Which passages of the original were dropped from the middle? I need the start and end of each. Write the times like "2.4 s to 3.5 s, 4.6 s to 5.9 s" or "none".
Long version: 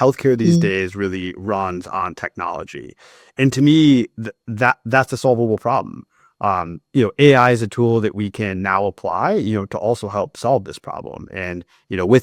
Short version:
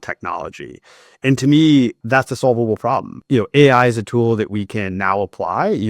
4.2 s to 4.8 s, 6.0 s to 6.8 s